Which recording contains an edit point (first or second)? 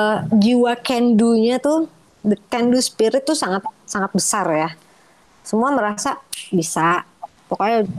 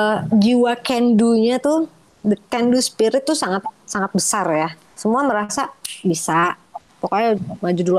second